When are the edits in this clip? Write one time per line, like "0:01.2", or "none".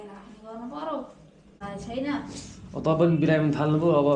0:01.6